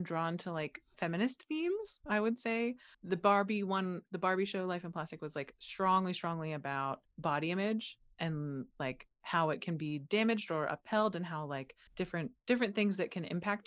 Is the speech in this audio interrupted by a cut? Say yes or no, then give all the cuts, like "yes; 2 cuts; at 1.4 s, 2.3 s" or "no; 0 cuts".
yes; 2 cuts; at 0.9 s, 2.9 s